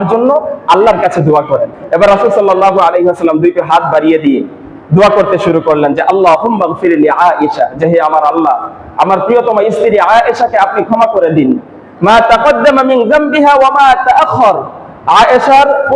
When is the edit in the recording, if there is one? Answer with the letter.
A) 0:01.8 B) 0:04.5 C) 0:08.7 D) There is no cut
A